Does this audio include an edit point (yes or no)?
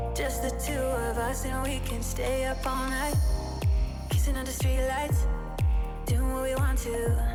no